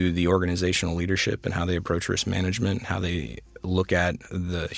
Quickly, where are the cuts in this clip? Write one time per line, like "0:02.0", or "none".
none